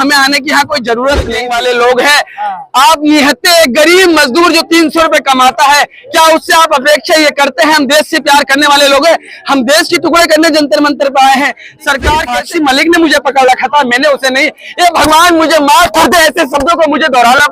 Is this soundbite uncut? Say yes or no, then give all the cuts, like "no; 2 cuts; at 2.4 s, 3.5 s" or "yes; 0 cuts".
no; 2 cuts; at 1.4 s, 12.4 s